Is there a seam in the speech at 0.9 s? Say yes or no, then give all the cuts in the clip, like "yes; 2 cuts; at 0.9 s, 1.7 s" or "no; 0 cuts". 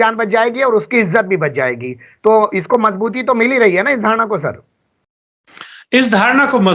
no; 0 cuts